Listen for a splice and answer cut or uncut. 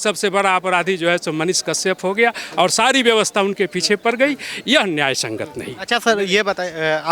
uncut